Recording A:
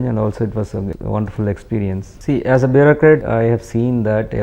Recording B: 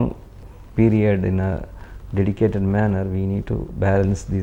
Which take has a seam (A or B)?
A